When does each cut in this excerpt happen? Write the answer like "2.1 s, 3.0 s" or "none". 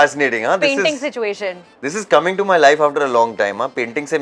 none